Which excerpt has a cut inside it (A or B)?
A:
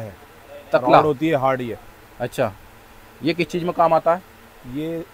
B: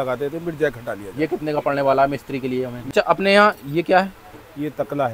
B